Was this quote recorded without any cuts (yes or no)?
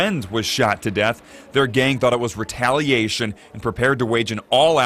yes